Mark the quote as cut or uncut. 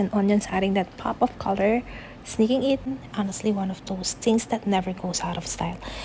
cut